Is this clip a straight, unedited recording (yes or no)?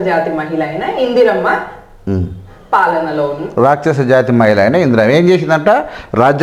yes